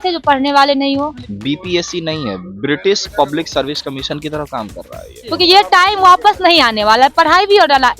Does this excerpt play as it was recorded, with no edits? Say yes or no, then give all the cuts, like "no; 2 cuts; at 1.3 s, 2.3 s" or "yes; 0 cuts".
no; 2 cuts; at 1.2 s, 5.2 s